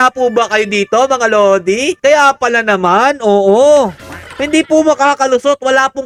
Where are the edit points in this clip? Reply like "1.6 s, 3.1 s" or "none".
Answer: none